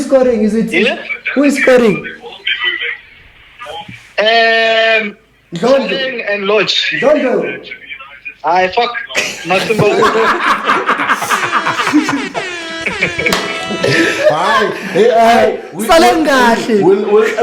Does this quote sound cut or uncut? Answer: uncut